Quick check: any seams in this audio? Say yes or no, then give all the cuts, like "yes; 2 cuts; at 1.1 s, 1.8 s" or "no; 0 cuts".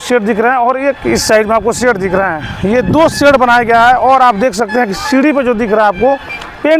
no; 0 cuts